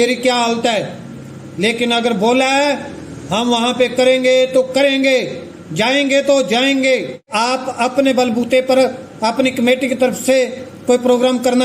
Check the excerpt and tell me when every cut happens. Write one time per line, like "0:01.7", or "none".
0:07.3